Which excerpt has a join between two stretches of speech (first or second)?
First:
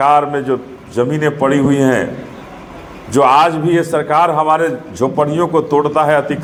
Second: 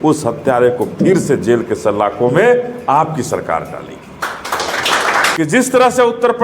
second